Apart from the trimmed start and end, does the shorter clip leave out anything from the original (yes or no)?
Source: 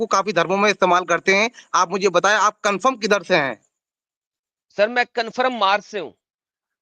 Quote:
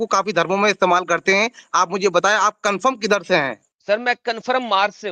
yes